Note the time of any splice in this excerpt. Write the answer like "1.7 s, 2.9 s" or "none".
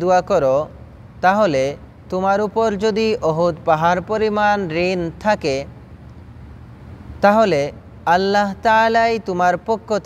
none